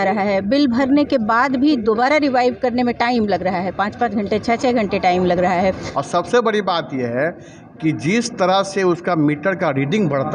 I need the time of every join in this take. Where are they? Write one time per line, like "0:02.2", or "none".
0:05.9